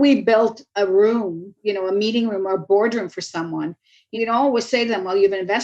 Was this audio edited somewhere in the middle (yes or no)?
yes